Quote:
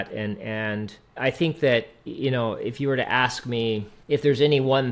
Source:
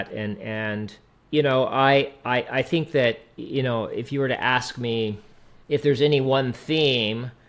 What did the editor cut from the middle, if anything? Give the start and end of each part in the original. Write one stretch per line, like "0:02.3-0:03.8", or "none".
0:01.2-0:02.5
0:05.2-0:05.5